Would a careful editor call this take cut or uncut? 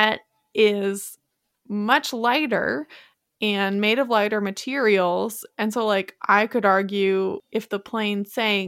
cut